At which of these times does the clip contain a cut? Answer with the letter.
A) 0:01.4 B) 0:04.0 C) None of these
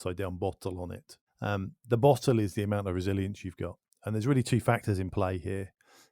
A